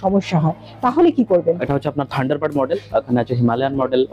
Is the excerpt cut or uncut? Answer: cut